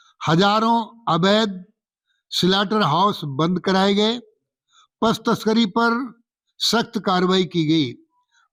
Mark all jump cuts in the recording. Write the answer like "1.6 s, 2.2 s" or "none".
none